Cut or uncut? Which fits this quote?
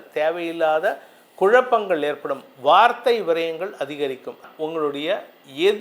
cut